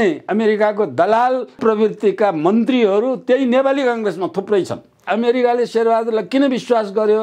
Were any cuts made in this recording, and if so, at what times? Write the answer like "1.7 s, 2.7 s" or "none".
5.0 s